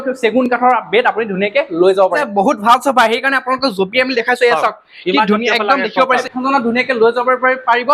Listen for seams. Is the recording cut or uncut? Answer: cut